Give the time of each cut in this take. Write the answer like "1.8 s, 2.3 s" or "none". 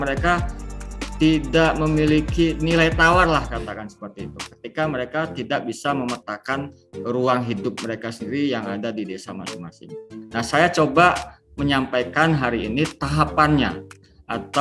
10.2 s